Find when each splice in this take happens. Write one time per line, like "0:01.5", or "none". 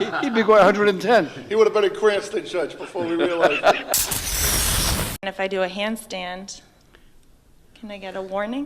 0:03.8
0:05.2

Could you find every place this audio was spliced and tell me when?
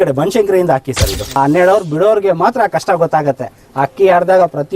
0:01.2

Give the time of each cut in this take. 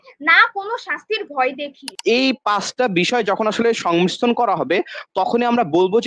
0:01.8

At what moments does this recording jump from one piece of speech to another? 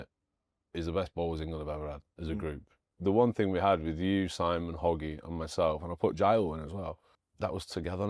0:02.9
0:07.2

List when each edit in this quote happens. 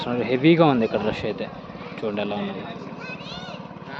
none

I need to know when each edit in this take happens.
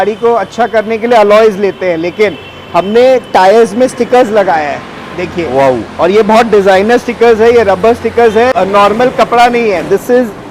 0:08.5

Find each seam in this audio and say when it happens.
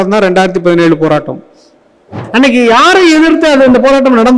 0:02.2

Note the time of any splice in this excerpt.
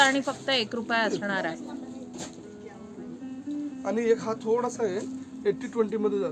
none

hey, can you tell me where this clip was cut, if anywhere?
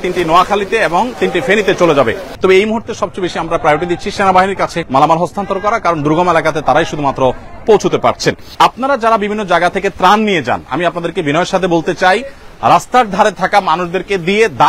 0:02.2
0:04.8
0:08.5

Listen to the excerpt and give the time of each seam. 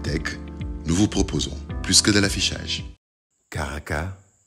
0:03.2

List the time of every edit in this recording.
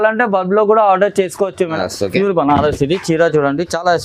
0:01.8

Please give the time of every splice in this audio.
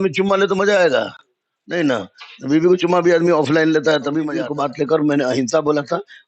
0:04.4

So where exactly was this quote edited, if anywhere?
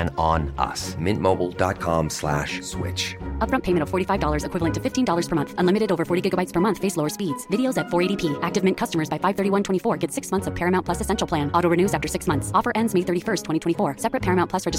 none

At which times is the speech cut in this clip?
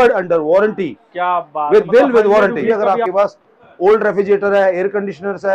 0:02.7

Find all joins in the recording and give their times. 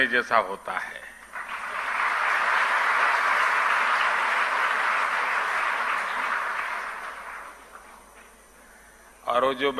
none

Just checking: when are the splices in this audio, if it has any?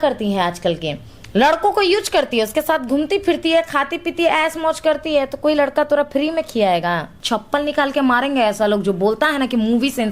0:07.1

